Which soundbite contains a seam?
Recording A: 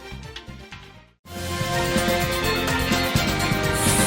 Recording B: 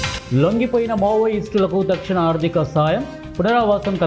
A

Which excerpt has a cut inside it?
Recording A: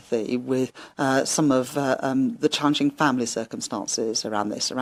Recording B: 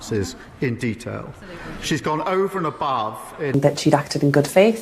B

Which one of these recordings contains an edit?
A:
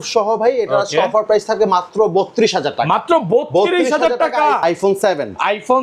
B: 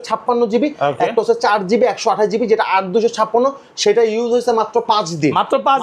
A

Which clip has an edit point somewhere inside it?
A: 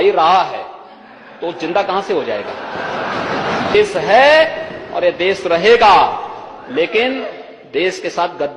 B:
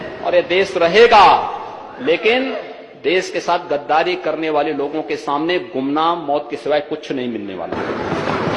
A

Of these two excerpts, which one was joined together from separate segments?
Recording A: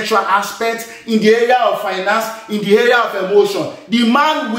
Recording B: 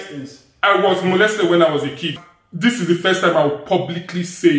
B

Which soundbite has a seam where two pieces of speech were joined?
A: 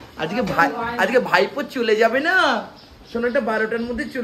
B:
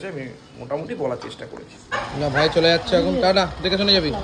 B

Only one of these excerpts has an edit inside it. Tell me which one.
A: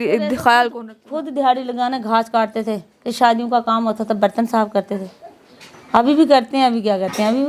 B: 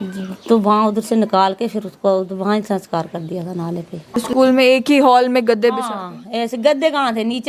B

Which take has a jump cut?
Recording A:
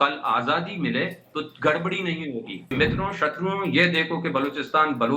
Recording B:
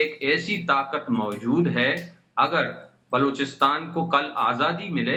A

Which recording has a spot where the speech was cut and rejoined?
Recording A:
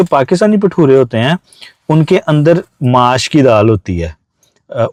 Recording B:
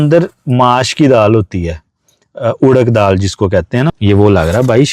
B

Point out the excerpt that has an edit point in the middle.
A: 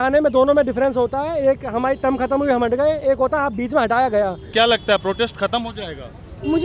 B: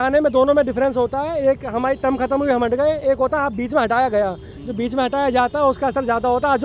A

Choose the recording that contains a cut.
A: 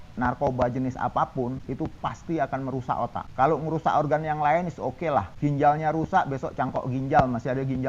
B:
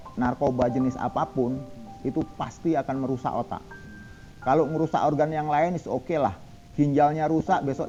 A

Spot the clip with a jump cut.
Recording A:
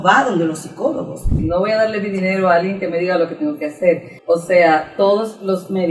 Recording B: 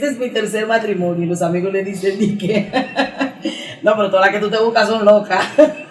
A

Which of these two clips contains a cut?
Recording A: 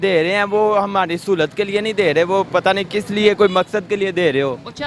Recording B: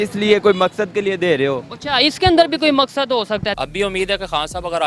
B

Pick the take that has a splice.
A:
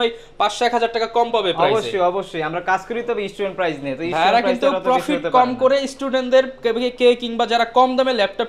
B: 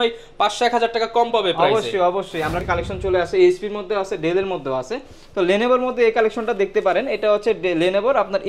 B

